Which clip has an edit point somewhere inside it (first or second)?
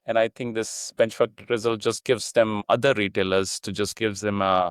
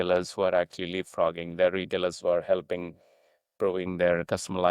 second